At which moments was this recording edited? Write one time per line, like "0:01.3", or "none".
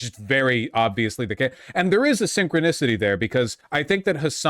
0:03.6